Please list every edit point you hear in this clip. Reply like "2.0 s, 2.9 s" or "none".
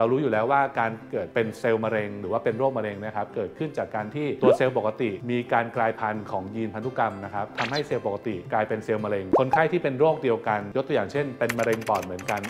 7.5 s, 9.4 s